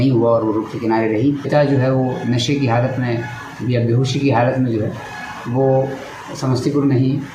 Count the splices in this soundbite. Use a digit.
1